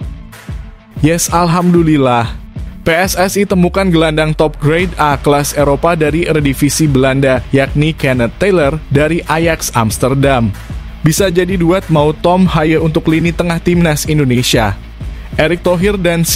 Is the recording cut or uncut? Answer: cut